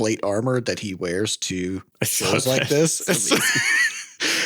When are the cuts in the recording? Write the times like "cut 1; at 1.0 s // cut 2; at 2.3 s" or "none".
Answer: cut 1; at 1.9 s